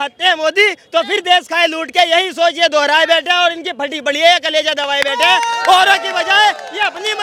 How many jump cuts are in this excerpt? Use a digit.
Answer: 0